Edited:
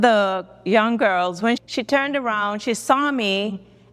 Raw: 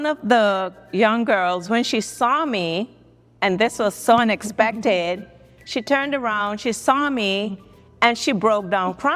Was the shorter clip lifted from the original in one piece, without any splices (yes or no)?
no